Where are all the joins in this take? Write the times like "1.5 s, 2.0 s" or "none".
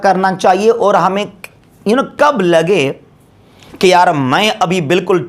none